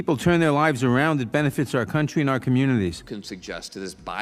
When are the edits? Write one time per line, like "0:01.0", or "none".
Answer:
0:03.0